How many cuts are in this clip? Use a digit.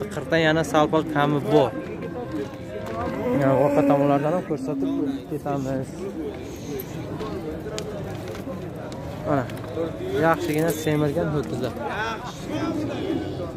0